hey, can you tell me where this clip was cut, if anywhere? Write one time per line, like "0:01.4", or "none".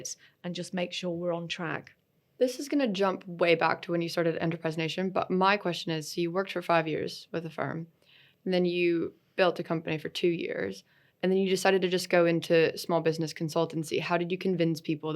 none